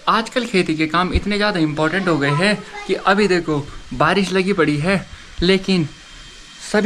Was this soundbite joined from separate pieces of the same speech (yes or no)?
no